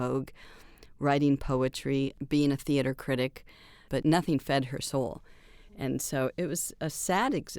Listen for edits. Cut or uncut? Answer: cut